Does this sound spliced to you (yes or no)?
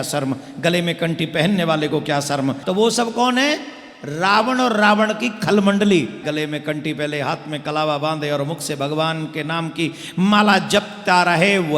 yes